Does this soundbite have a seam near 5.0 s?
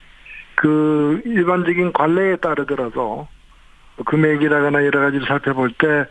yes; 1 cut; at 5.0 s

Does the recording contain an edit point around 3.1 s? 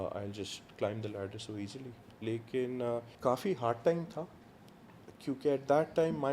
yes; 1 cut; at 3.1 s

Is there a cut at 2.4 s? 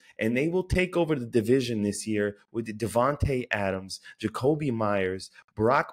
no; 0 cuts

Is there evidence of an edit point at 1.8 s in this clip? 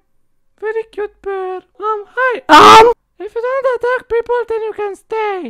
yes; 1 cut; at 1.8 s

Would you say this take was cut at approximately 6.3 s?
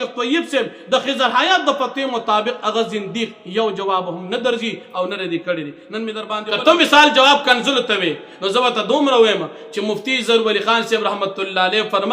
yes; 1 cut; at 6.3 s

